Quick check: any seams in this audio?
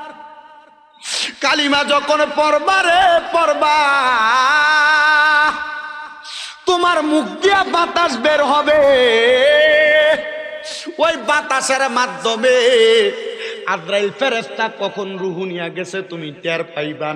no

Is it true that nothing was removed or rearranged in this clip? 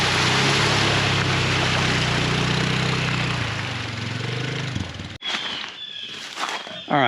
yes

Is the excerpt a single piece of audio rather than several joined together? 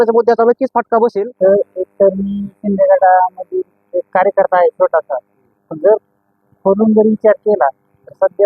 no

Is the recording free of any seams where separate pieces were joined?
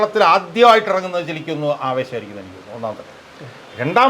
yes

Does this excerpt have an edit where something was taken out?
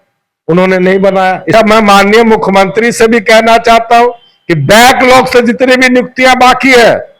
yes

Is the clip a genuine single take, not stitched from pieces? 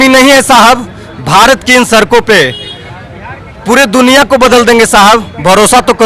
yes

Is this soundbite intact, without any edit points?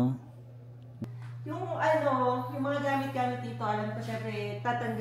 no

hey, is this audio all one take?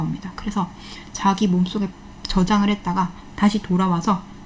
yes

